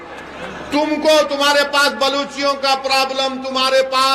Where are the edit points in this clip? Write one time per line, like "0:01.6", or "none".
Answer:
none